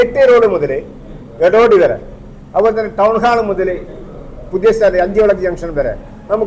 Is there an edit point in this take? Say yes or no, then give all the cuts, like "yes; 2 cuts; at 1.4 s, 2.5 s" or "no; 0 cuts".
no; 0 cuts